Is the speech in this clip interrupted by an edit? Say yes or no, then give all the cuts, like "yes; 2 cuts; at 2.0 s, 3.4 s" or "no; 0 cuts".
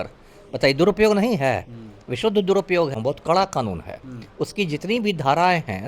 yes; 1 cut; at 2.9 s